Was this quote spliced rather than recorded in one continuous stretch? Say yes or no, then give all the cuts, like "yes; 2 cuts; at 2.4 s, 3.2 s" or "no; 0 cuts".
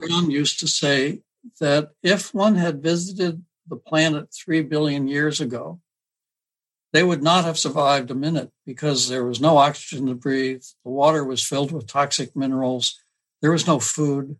no; 0 cuts